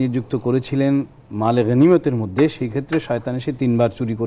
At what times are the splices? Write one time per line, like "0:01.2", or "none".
none